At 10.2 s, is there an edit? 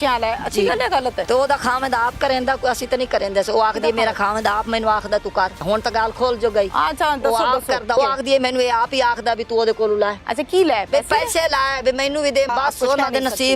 yes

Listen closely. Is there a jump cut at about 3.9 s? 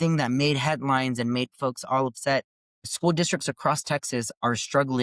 no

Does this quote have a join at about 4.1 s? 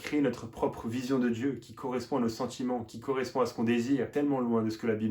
yes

